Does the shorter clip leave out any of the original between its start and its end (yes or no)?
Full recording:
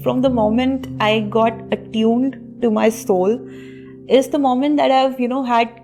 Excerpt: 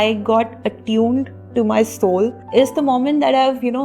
yes